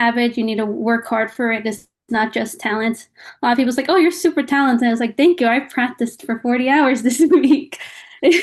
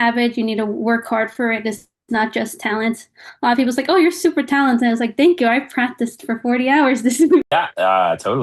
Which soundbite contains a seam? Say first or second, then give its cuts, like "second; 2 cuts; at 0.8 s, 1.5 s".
second; 1 cut; at 7.4 s